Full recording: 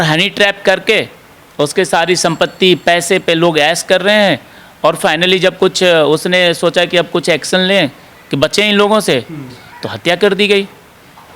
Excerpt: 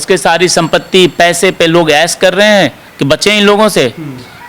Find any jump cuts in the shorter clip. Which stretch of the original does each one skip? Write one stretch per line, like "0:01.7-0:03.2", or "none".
0:04.5-0:08.2